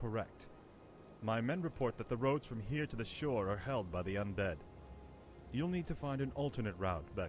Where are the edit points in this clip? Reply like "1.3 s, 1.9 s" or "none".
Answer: 4.3 s